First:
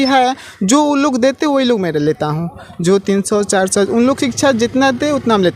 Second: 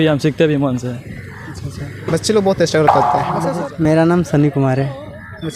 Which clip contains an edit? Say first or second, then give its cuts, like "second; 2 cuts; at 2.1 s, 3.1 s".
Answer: second; 1 cut; at 3.4 s